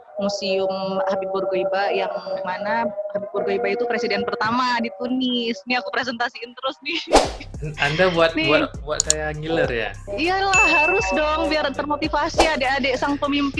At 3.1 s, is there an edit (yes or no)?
no